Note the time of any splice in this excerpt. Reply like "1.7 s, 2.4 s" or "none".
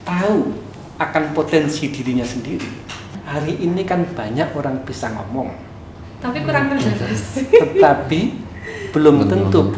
3.2 s